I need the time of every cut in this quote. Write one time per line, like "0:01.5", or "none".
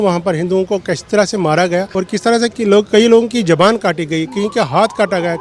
0:01.9